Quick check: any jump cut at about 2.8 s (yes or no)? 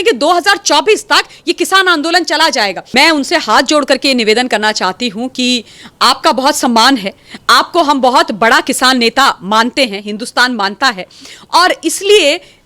yes